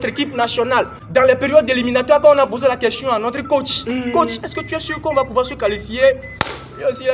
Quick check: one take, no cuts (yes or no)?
no